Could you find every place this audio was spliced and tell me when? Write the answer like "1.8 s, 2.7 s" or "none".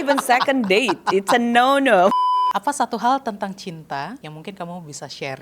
2.1 s, 4.3 s